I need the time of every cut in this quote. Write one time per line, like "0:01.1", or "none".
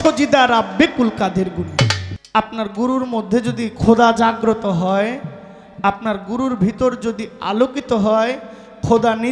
0:02.1